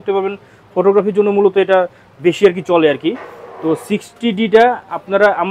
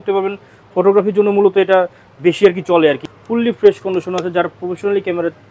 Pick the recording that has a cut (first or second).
second